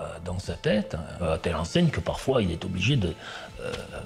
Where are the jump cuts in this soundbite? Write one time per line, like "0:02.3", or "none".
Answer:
0:01.3